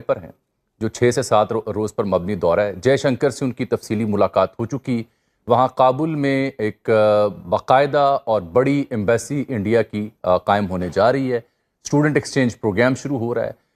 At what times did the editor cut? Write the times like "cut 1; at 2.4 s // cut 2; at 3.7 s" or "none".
none